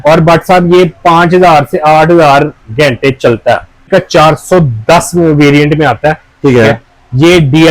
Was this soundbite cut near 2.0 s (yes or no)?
no